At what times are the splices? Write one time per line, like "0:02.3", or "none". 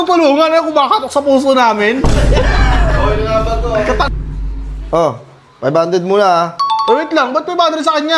0:04.1